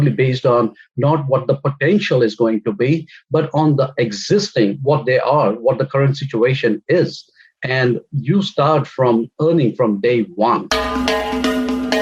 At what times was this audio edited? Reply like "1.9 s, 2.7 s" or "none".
10.8 s

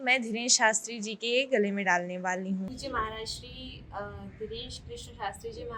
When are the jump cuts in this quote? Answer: 2.8 s

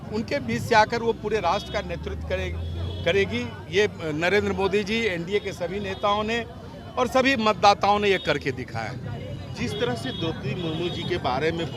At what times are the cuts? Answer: none

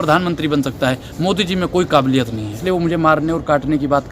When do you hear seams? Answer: 2.6 s

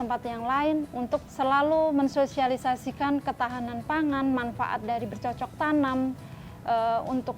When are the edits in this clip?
1.3 s

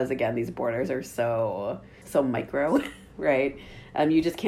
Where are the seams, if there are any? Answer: 1.9 s

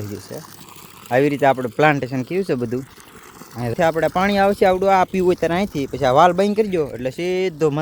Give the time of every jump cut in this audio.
3.7 s

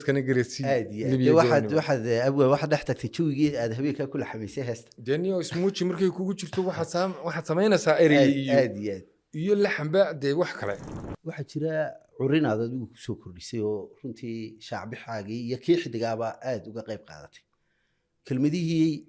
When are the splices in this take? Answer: 10.8 s

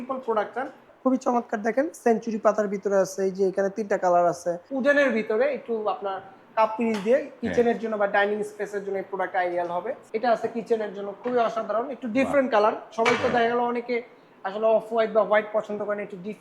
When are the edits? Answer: 0.9 s, 4.6 s, 10.0 s

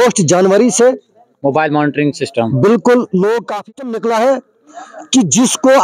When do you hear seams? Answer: 3.5 s

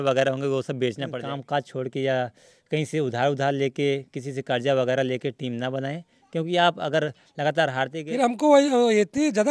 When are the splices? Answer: 1.1 s, 8.0 s

